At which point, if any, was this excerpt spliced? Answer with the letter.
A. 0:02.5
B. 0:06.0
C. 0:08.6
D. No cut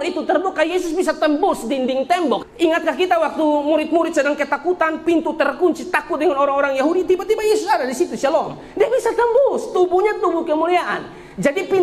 A